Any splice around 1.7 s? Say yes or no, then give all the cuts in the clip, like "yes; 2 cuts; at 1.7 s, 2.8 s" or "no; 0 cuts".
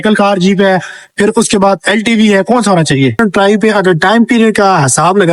no; 1 cut; at 3.2 s